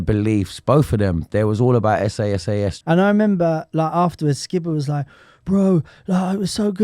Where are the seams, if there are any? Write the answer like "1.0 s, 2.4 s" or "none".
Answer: 2.8 s